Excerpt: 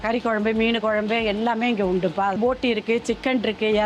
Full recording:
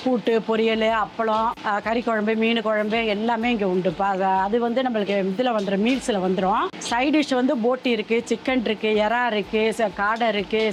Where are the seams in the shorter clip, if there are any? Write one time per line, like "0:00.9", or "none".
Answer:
0:02.4